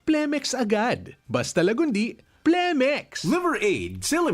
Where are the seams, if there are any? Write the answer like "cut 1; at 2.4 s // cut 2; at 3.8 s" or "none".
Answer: cut 1; at 3.1 s